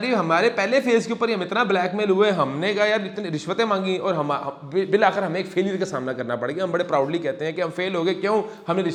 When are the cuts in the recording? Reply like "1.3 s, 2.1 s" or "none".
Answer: none

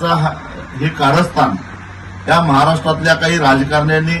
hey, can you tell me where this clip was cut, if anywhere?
none

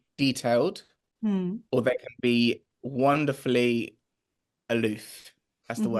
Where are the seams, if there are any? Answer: 2.8 s

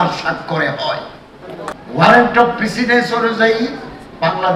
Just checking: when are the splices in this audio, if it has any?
1.7 s

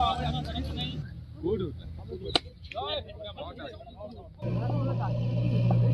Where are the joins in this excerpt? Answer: none

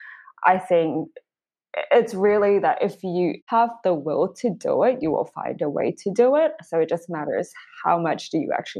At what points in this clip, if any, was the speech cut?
3.3 s

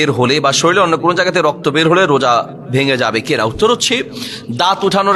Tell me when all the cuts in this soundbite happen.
none

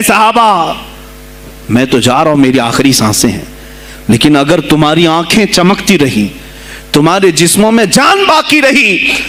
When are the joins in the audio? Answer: none

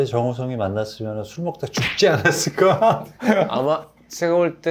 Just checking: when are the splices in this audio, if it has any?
3.5 s

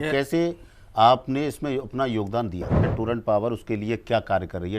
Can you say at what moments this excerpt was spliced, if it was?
2.9 s

